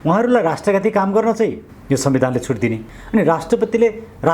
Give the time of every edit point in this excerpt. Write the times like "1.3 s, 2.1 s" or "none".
1.7 s, 2.9 s